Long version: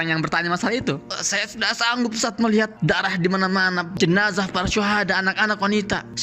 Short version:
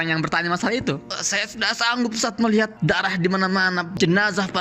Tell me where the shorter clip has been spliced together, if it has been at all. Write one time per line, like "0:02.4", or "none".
none